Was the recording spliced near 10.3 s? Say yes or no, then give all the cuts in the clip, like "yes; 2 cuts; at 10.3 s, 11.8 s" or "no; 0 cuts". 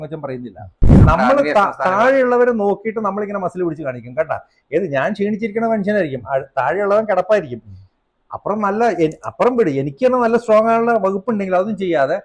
no; 1 cut; at 0.9 s